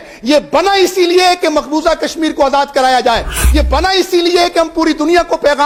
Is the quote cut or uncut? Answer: uncut